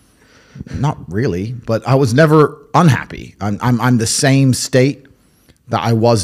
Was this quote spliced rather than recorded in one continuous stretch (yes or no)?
no